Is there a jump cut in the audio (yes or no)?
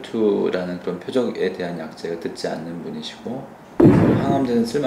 no